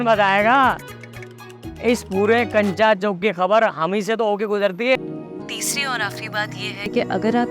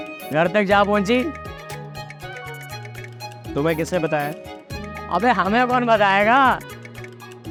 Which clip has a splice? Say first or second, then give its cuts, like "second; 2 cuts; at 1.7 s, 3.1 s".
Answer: first; 1 cut; at 5.0 s